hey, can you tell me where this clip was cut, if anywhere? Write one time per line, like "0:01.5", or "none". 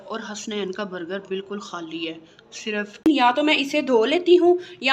0:03.2